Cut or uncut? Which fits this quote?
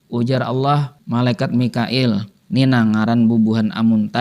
cut